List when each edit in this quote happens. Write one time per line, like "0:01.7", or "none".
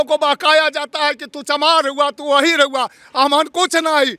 none